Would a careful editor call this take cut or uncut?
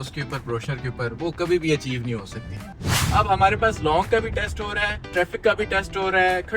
cut